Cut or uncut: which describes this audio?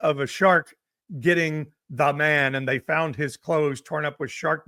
uncut